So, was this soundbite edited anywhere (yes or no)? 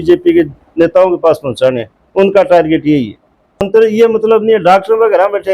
yes